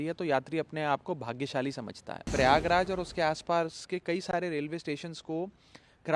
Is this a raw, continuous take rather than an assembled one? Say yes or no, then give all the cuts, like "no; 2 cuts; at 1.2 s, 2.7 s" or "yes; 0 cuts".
no; 1 cut; at 2.1 s